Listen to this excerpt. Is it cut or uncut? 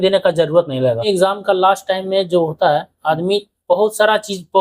cut